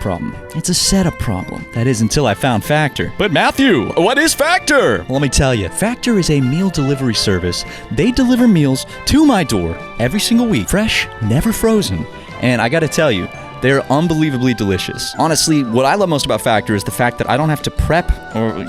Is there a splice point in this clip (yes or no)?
yes